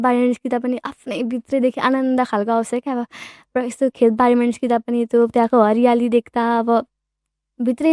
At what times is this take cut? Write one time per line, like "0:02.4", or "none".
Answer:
none